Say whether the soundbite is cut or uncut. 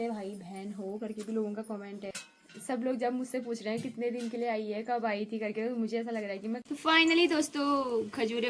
cut